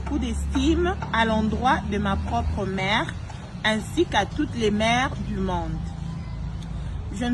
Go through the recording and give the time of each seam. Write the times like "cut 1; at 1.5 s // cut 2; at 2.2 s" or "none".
none